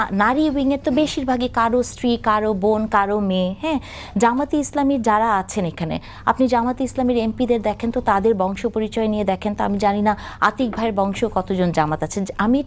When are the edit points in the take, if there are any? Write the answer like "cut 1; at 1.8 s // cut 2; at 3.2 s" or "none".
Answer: none